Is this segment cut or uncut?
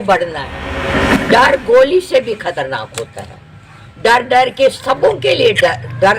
cut